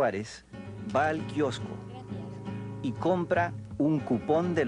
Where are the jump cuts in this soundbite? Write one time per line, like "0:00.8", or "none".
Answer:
0:03.6